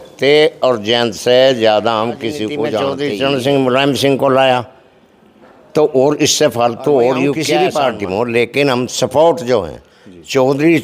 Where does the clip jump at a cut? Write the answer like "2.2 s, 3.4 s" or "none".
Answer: 2.9 s, 7.5 s

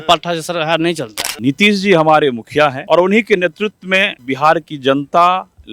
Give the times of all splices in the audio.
1.2 s, 2.8 s, 4.2 s

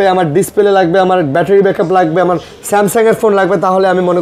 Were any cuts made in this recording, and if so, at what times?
none

